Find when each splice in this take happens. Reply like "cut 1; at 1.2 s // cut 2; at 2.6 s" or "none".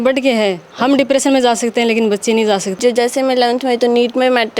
cut 1; at 2.8 s